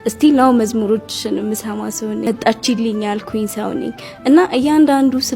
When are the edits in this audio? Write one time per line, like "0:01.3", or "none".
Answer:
0:02.3